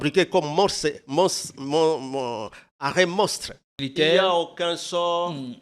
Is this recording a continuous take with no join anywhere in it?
no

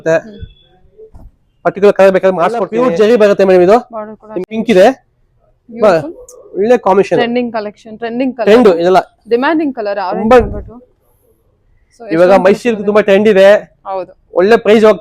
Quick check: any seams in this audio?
yes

